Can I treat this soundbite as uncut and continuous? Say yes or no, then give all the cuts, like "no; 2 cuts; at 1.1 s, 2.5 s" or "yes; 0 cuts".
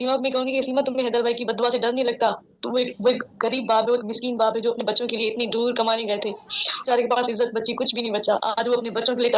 no; 1 cut; at 6.8 s